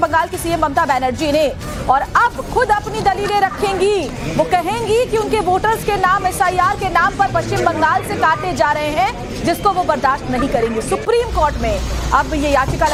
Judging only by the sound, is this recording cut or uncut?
uncut